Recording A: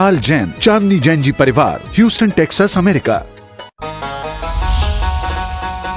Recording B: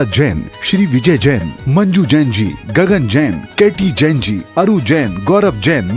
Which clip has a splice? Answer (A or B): A